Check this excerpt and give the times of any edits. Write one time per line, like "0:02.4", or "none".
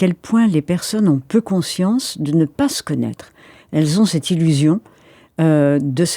none